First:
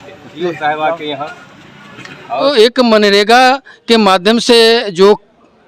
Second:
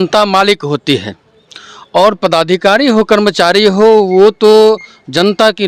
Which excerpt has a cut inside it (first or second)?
first